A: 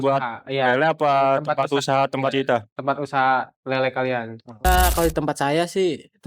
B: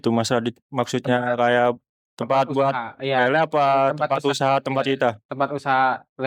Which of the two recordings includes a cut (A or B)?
A